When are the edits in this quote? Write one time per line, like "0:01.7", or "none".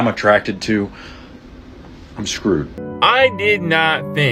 0:02.8

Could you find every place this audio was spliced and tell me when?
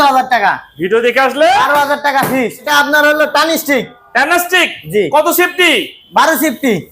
0:02.7

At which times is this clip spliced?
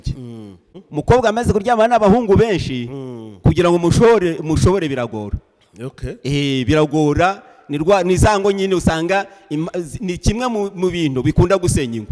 none

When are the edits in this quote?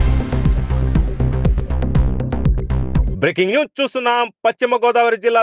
0:03.1

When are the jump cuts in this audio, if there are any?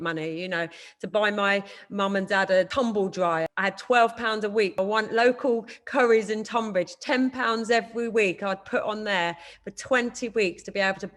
0:02.7
0:03.5
0:04.8

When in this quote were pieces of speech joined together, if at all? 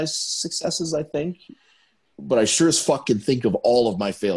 none

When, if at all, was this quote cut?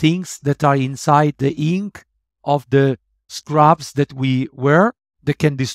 none

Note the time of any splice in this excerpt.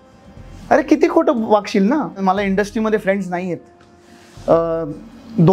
0:02.2

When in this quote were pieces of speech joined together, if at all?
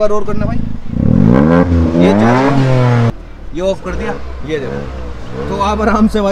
0:03.1

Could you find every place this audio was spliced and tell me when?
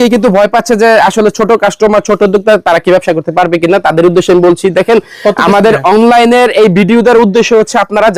none

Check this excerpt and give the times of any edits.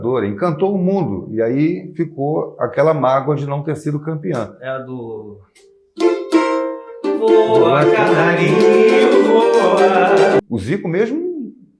0:10.4

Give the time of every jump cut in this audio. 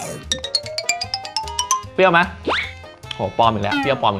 0:01.9

